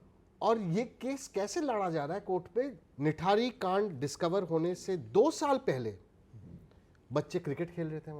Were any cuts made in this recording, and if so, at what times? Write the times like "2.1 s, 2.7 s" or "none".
2.8 s